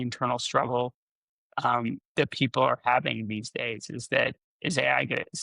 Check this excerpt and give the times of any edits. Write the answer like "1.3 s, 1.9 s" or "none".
4.5 s